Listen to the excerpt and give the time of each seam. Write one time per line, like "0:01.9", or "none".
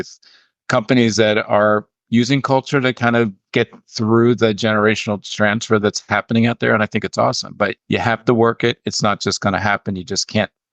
0:03.4
0:07.8

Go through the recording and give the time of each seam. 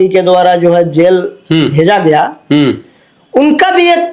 none

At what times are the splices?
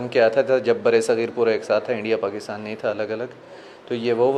none

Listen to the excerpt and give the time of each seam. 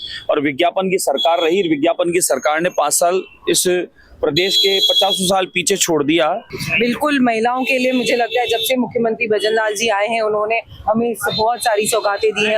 0:06.5

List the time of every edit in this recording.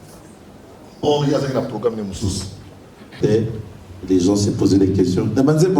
0:03.1

